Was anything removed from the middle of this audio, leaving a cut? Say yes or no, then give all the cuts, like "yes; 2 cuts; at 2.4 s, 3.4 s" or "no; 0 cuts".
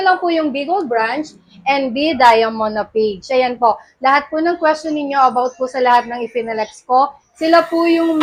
no; 0 cuts